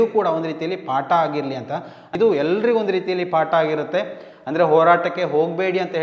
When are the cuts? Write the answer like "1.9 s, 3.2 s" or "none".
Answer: 2.1 s